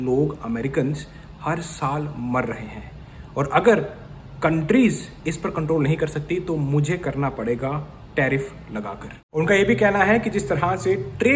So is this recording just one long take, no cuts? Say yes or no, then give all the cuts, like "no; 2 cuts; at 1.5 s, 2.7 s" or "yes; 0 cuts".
yes; 0 cuts